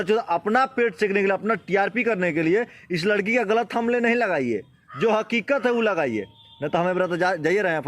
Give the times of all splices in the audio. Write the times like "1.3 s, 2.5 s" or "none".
none